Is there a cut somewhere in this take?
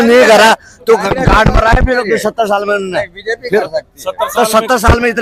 no; 0 cuts

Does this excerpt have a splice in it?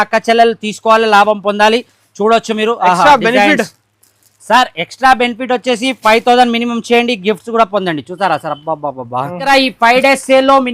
yes; 1 cut; at 9.4 s

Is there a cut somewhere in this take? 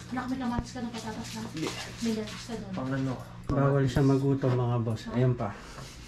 no; 0 cuts

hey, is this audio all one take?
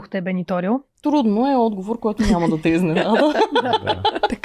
no; 1 cut; at 0.9 s

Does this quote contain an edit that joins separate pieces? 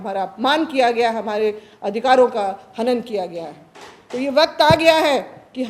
no; 0 cuts

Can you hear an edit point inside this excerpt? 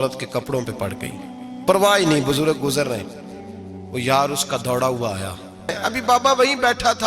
yes; 1 cut; at 5.8 s

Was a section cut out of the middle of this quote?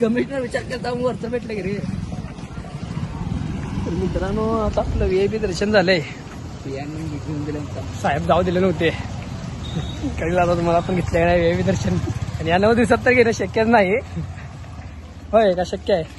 no; 0 cuts

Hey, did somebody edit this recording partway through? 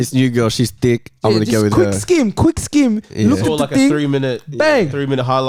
no; 0 cuts

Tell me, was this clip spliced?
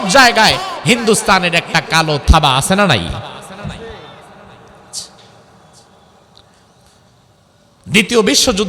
no; 0 cuts

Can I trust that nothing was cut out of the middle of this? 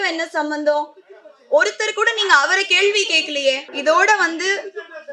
no; 1 cut; at 3.7 s

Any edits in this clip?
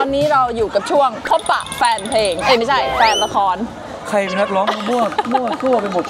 no; 0 cuts

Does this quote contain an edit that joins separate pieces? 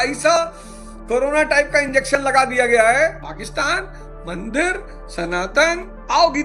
no; 0 cuts

